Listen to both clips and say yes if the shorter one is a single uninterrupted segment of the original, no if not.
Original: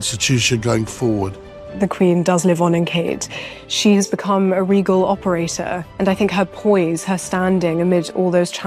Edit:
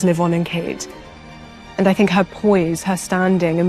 no